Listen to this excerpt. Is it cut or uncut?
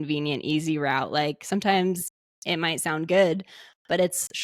uncut